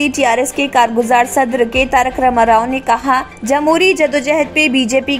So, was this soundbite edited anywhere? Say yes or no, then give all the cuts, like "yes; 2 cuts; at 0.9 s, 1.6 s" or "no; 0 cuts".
no; 0 cuts